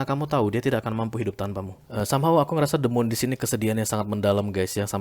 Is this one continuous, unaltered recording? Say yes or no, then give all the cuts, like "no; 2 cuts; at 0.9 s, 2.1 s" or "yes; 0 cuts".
no; 1 cut; at 1.8 s